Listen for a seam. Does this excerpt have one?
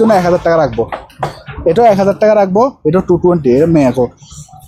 no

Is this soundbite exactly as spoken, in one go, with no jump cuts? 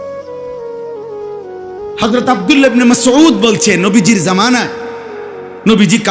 no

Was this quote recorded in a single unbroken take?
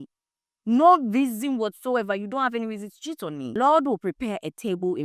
no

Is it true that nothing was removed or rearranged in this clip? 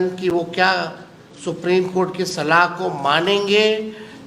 yes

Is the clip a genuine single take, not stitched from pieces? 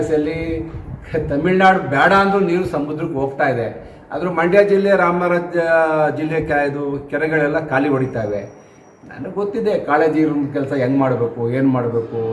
yes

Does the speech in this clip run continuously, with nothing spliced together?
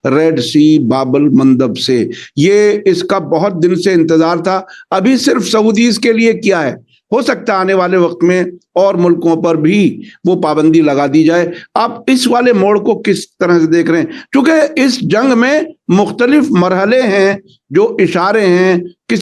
yes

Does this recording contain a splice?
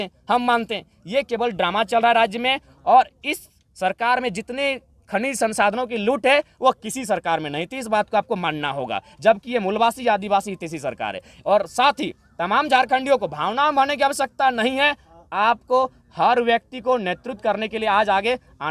no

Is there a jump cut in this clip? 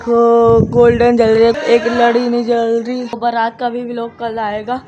yes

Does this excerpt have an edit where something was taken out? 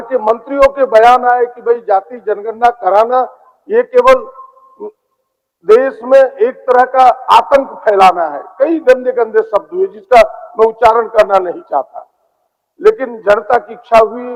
no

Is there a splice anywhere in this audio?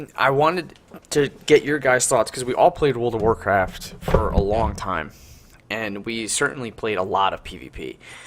yes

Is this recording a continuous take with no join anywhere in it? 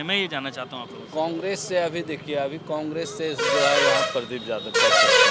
yes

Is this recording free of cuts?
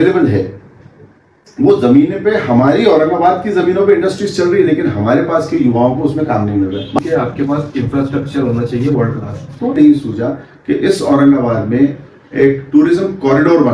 no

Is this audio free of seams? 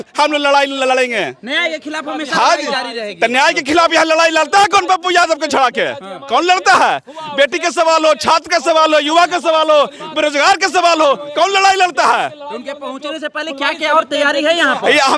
yes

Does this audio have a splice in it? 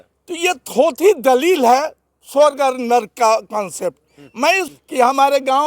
yes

